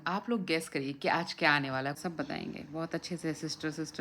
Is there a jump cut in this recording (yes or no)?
yes